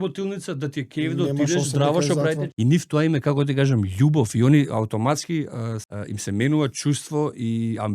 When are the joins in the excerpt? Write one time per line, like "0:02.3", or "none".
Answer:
0:02.5
0:05.9